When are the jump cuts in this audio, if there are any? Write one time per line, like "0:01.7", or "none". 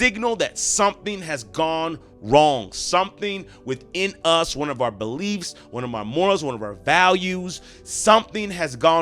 none